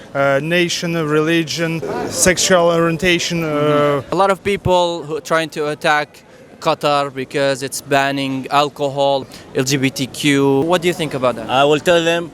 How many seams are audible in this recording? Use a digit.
3